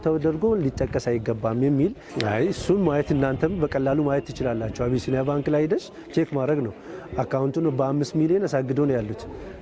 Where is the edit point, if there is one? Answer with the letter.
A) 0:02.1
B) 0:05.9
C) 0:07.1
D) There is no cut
A